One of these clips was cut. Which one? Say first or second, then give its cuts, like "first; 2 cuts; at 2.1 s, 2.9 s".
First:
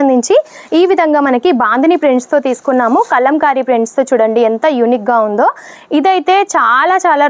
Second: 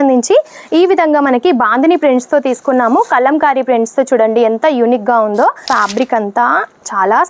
second; 1 cut; at 5.6 s